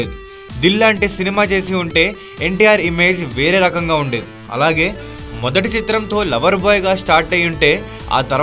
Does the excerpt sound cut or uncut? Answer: uncut